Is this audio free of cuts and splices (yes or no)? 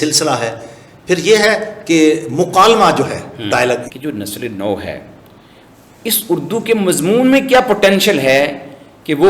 no